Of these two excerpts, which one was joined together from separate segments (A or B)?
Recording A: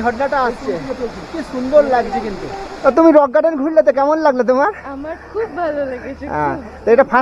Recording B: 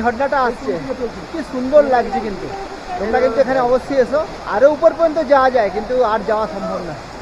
A